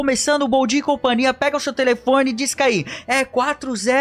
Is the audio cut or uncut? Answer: uncut